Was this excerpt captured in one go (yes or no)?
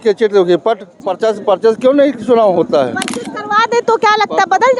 no